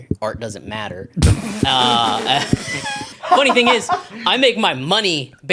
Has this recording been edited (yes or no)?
yes